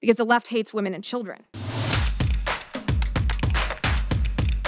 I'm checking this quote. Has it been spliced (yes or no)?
yes